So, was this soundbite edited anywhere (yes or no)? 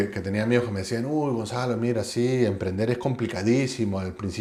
no